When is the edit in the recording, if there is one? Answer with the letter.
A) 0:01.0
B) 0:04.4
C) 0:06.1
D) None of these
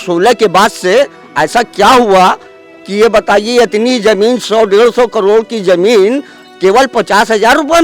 D